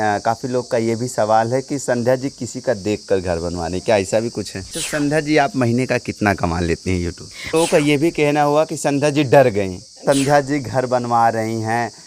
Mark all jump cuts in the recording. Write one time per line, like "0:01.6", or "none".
0:04.7
0:07.5
0:10.0

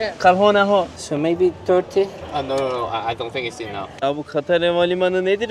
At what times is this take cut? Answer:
0:01.0
0:03.9

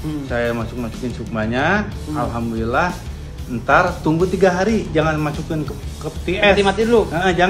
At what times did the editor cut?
none

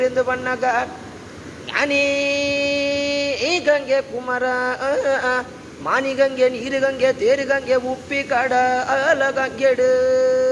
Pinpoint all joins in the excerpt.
none

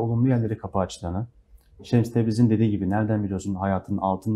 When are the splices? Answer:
none

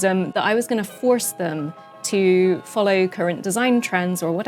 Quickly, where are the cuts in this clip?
none

